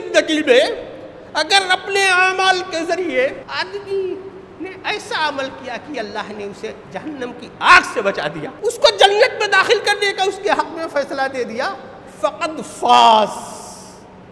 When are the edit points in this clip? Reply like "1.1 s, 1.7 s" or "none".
3.4 s, 6.8 s, 8.5 s

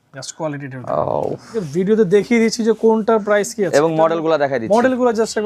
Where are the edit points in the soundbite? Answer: 1.6 s

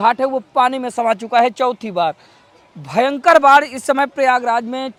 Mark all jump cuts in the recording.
none

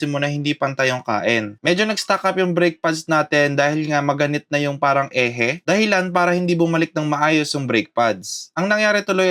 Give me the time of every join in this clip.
none

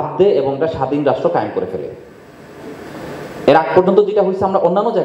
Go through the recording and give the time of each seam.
none

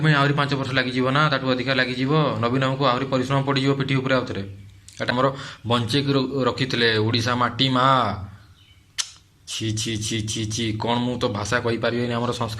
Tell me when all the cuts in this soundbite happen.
5.1 s

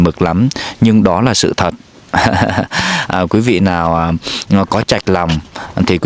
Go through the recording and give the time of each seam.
none

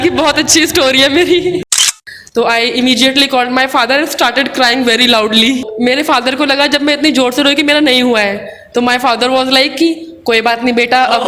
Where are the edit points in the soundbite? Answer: 2.0 s, 5.6 s

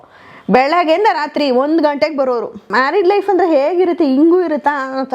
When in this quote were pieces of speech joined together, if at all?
2.6 s

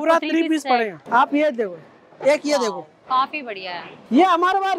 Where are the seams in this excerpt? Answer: 1.0 s, 3.9 s

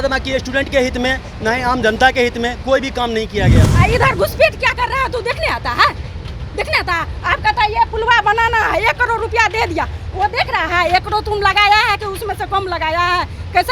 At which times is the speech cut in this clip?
3.7 s

